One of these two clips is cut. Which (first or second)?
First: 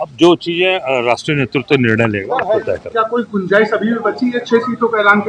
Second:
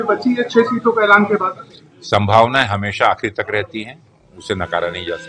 first